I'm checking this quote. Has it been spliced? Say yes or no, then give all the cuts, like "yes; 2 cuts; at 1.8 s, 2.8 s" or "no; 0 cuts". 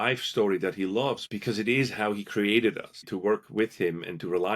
yes; 2 cuts; at 1.3 s, 3.0 s